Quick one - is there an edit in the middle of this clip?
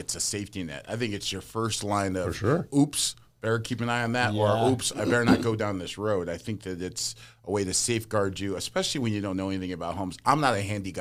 no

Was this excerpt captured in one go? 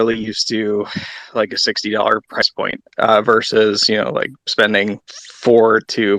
yes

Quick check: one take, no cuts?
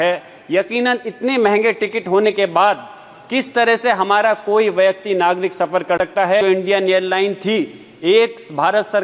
no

